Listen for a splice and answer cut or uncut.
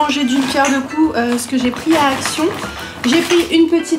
uncut